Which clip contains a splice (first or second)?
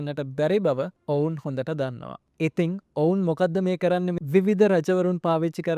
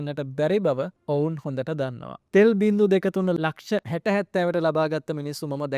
second